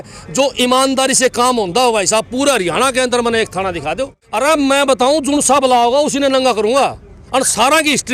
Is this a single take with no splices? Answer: no; 1 cut; at 4.2 s

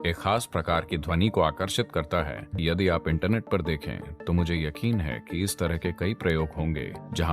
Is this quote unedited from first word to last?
no; 1 cut; at 2.6 s

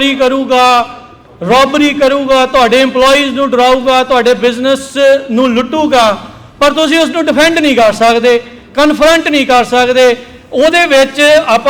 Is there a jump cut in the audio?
no; 0 cuts

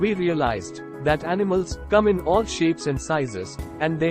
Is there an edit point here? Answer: no; 0 cuts

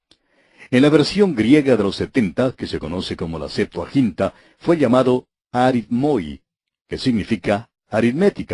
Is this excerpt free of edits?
yes; 0 cuts

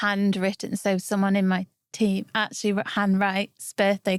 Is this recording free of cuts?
yes; 0 cuts

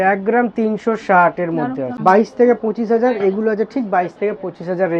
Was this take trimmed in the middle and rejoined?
yes; 1 cut; at 1.9 s

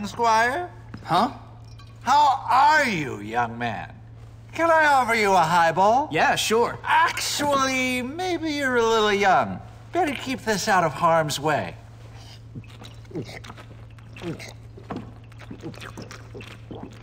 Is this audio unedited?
no; 1 cut; at 6.0 s

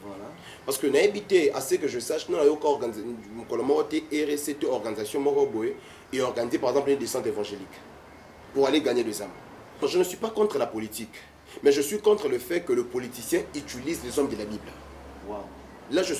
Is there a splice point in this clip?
yes; 1 cut; at 9.8 s

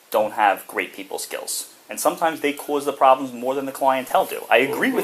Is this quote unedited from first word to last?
yes; 0 cuts

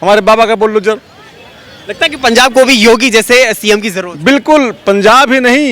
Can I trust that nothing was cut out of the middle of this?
yes; 0 cuts

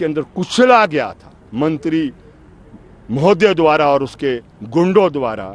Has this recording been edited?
no; 0 cuts

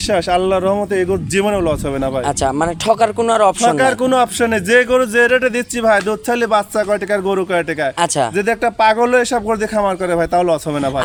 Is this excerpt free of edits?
yes; 0 cuts

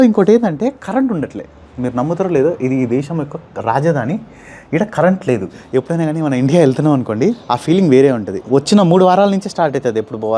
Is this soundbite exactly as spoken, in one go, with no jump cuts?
no; 3 cuts; at 5.6 s, 7.5 s, 8.3 s

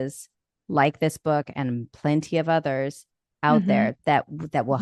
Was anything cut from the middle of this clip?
no; 0 cuts

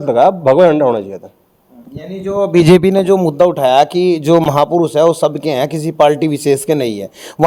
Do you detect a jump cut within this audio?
no; 0 cuts

